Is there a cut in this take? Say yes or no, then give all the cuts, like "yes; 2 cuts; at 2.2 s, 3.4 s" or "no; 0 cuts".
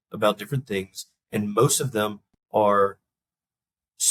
no; 0 cuts